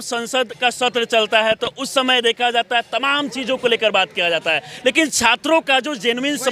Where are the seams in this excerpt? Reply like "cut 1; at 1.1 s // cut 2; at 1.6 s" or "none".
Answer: none